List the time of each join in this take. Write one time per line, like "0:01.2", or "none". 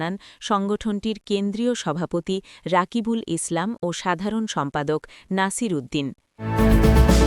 0:06.4